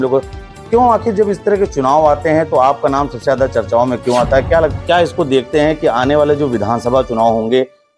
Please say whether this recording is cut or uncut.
cut